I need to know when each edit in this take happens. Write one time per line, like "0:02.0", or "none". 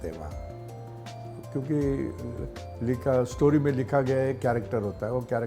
none